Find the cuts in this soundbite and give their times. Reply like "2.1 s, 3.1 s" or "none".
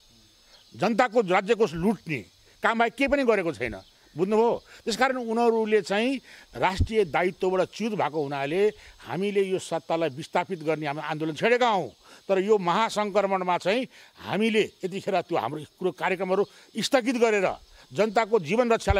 none